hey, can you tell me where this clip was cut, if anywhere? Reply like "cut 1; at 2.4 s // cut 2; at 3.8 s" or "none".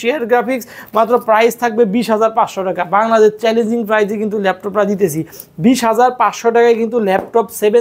none